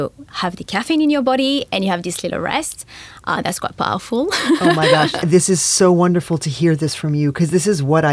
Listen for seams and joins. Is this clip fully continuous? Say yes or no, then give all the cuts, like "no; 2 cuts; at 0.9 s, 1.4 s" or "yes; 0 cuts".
no; 1 cut; at 5.2 s